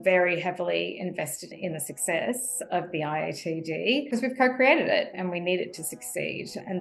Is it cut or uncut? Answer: cut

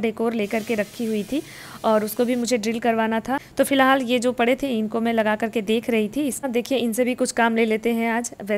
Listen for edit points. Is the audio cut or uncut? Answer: cut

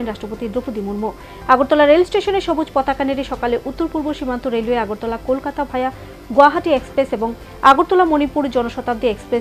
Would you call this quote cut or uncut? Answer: uncut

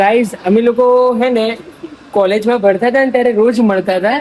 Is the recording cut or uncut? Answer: uncut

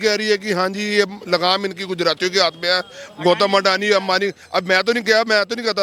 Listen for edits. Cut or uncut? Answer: uncut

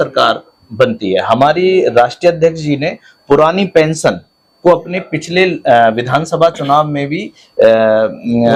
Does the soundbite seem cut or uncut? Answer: uncut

